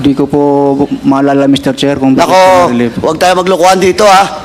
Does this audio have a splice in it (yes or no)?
no